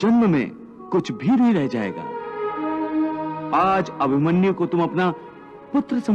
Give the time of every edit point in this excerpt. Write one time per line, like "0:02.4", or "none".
none